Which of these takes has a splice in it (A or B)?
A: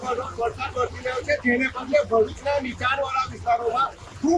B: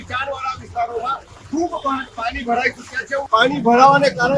B